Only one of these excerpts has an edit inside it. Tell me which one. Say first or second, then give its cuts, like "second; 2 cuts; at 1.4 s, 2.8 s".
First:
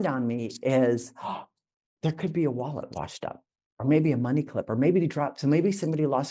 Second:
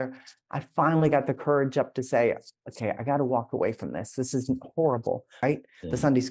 second; 1 cut; at 5.4 s